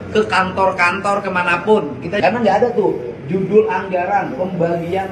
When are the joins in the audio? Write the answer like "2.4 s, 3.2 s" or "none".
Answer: 2.2 s